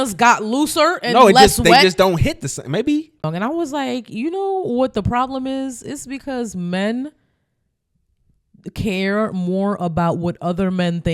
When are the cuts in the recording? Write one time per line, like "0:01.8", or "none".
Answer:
0:03.2